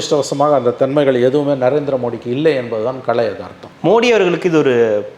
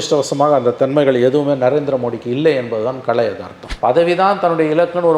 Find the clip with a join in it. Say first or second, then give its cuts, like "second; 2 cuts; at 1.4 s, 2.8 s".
second; 1 cut; at 3.6 s